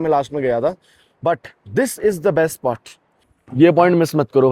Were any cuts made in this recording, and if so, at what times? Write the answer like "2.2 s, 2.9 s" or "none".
3.3 s